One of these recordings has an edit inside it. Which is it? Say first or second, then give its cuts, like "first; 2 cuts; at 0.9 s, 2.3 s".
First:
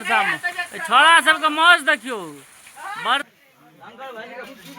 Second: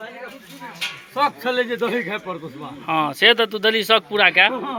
first; 1 cut; at 3.2 s